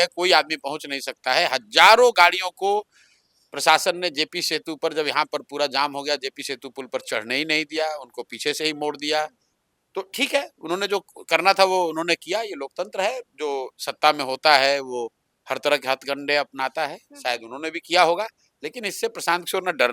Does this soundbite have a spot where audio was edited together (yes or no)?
no